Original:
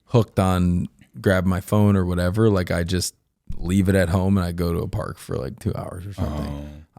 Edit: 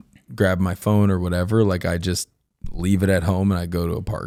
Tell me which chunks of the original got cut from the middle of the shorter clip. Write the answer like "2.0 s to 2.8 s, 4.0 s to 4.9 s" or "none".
none

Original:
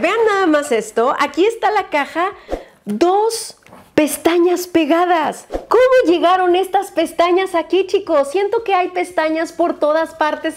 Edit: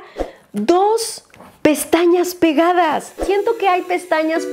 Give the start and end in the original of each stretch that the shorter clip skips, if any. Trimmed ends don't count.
5.6 s to 8.3 s

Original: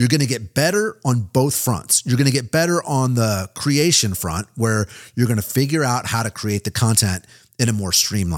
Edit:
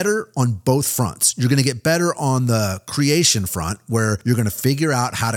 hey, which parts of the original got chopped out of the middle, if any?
4.9 s to 5.1 s

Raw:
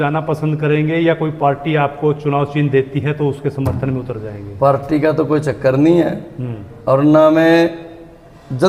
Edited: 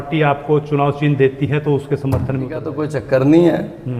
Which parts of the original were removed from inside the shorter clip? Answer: 4.3 s to 5.3 s

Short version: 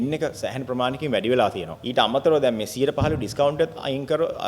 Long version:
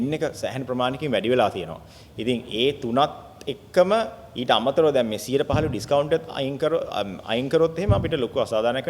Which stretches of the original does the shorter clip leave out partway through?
1.7 s to 4.3 s

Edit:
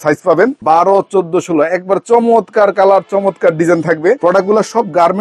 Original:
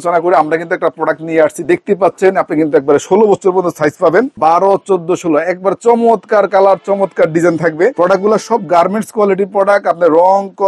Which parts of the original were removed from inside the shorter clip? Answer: none

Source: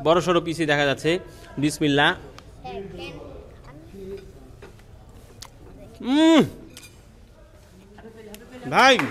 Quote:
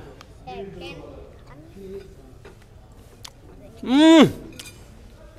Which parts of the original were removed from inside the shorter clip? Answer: none

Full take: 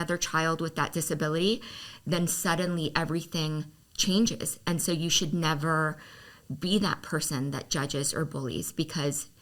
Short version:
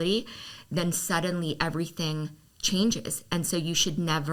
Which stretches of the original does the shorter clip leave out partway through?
none

